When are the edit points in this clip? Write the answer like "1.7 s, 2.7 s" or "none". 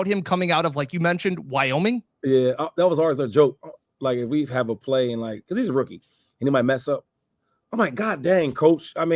none